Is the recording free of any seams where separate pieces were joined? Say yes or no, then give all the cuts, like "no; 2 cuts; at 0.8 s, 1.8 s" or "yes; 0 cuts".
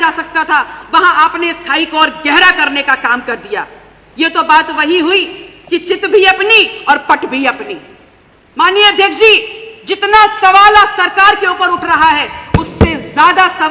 yes; 0 cuts